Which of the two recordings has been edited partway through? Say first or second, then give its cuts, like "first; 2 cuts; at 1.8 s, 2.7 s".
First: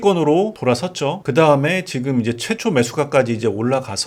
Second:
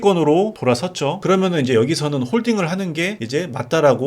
second; 1 cut; at 1.2 s